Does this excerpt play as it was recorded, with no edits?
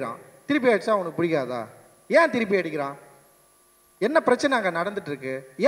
yes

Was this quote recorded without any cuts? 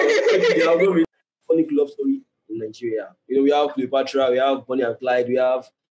no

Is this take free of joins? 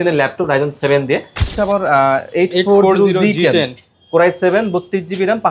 no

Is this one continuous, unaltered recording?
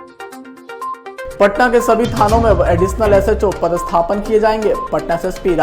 no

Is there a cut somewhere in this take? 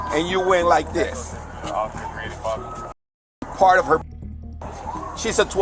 no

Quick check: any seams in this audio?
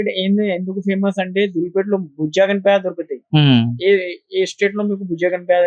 no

